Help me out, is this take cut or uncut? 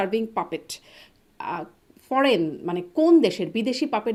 uncut